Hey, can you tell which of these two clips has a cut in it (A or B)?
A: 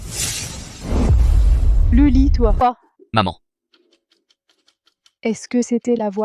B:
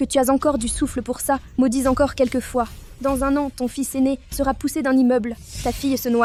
A